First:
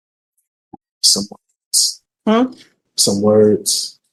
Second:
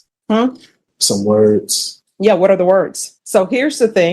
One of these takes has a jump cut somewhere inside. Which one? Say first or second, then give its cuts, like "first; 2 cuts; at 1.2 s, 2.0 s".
second; 1 cut; at 3.1 s